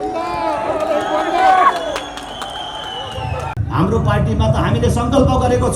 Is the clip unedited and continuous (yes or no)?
no